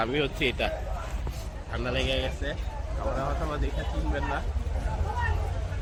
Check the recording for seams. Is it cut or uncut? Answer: uncut